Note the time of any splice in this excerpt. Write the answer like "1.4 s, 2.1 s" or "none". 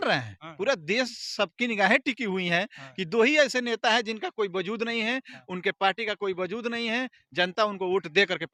none